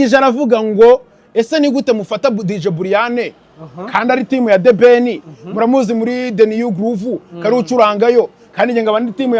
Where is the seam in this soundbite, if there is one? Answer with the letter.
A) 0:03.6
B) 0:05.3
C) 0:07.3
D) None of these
D